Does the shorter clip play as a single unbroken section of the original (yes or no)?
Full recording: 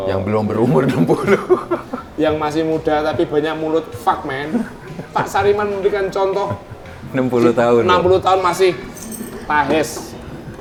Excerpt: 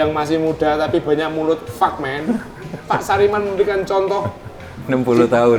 yes